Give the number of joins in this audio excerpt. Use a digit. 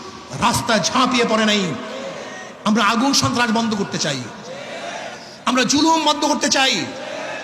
0